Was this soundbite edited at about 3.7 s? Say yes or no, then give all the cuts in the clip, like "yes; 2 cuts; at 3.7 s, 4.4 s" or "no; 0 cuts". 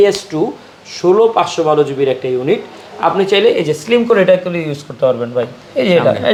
no; 0 cuts